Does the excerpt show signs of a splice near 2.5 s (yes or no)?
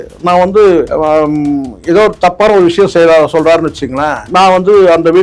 no